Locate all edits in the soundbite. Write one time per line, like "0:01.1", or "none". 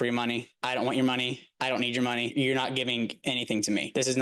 none